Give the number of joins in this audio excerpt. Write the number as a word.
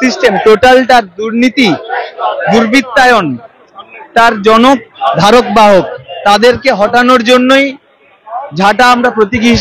zero